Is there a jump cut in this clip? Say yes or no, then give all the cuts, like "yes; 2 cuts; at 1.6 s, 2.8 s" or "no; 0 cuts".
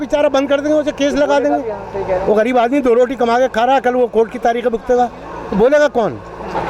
no; 0 cuts